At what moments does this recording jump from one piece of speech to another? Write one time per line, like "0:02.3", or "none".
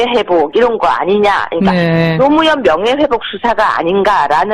0:01.0